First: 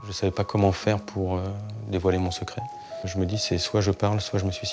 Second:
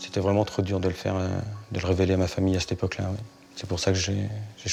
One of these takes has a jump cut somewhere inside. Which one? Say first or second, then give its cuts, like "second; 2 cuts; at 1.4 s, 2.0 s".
first; 1 cut; at 3.1 s